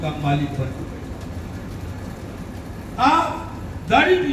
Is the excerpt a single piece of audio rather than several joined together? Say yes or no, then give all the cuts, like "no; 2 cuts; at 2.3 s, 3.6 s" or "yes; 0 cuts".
no; 1 cut; at 2.5 s